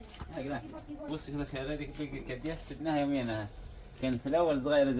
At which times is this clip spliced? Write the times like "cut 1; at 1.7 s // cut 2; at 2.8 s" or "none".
cut 1; at 1.1 s